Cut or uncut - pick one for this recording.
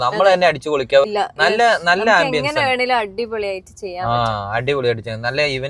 cut